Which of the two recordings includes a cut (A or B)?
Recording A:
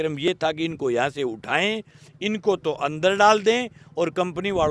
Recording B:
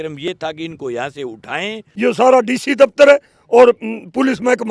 B